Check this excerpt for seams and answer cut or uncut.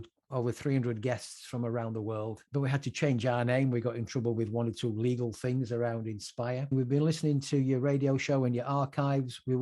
cut